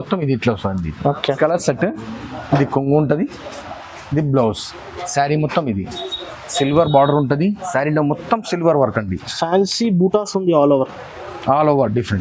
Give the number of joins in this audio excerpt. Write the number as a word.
one